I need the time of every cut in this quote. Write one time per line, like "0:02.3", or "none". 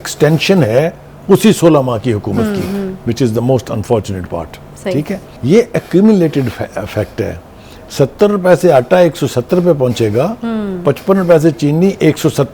0:05.3